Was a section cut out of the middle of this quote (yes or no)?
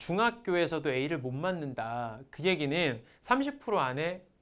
no